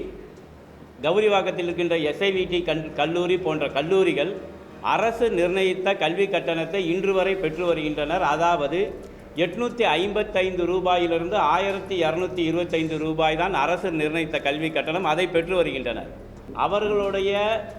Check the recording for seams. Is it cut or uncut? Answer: cut